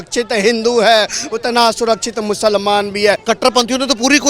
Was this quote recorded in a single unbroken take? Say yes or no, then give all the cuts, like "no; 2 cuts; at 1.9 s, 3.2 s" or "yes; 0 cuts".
no; 1 cut; at 3.2 s